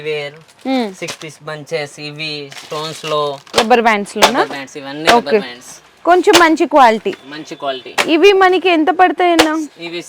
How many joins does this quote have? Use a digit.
1